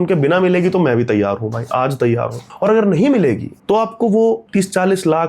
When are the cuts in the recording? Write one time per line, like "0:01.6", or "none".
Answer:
0:02.4
0:03.5
0:04.4